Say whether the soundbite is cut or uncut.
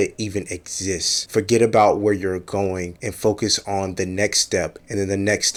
uncut